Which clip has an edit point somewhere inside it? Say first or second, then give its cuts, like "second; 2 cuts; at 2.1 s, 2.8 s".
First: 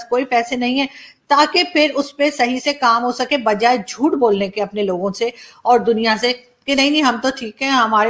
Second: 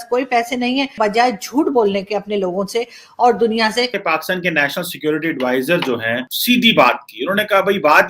second; 2 cuts; at 1.0 s, 4.0 s